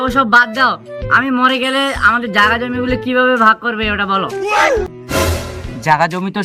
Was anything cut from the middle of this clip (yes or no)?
yes